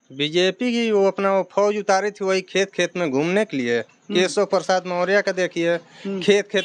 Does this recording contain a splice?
no; 0 cuts

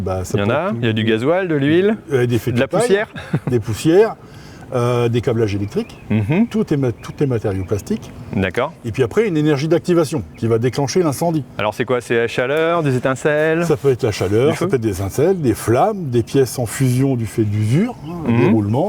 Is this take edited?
no; 0 cuts

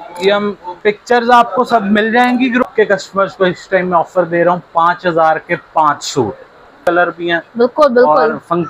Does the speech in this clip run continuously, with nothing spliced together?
no; 2 cuts; at 2.6 s, 6.7 s

